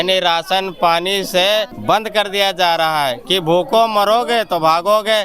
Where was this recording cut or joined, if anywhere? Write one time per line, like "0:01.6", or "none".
0:01.7